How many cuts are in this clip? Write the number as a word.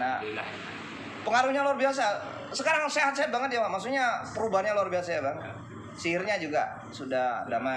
zero